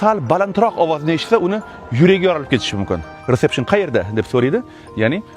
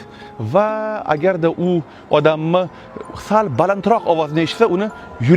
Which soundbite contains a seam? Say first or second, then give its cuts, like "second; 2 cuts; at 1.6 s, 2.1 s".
first; 1 cut; at 3.2 s